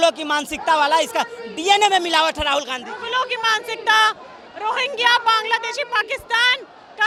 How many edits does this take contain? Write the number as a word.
zero